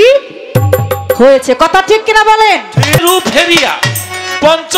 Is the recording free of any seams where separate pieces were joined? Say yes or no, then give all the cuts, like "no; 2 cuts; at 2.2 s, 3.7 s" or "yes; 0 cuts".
no; 1 cut; at 3.0 s